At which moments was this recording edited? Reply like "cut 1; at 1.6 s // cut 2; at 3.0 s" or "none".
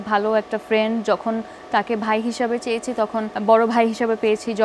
cut 1; at 3.3 s

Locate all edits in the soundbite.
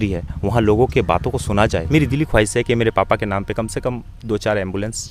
cut 1; at 1.9 s

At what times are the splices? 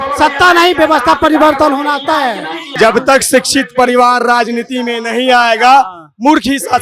cut 1; at 2.8 s

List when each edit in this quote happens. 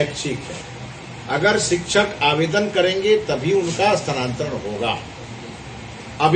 none

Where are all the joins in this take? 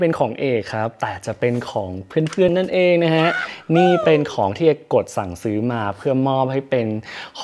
none

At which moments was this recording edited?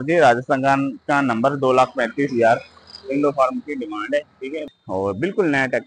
cut 1; at 4.7 s

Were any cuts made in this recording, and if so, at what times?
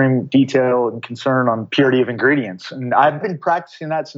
cut 1; at 1.7 s // cut 2; at 3.2 s

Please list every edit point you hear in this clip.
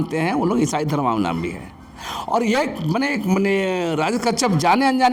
none

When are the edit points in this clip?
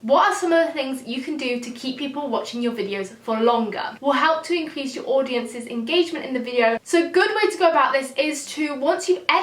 cut 1; at 4.0 s // cut 2; at 6.8 s

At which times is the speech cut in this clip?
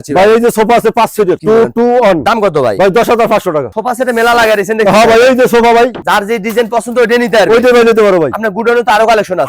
cut 1; at 2.2 s // cut 2; at 3.7 s

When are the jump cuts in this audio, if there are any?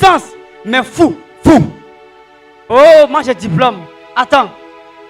cut 1; at 2.6 s

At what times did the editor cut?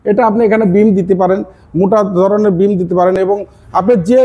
none

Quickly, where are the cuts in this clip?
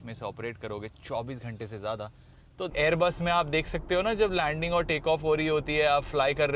cut 1; at 2.7 s

